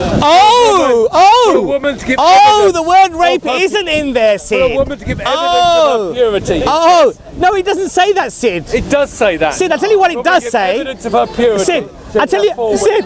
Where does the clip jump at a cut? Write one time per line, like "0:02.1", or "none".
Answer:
none